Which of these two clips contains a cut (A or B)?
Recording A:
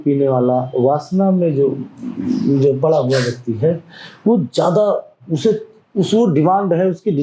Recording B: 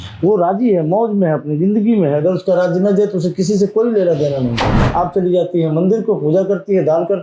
B